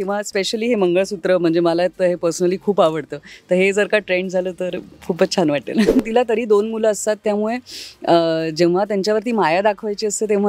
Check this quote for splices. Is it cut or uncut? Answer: cut